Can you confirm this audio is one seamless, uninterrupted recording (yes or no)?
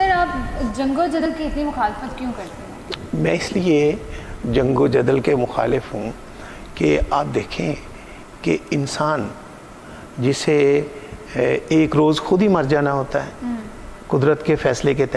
no